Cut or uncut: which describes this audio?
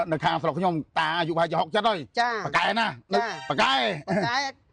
cut